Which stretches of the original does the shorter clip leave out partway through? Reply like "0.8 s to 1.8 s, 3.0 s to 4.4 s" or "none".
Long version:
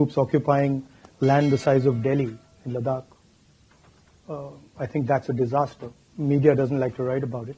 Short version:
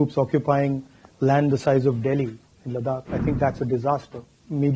3.1 s to 4.8 s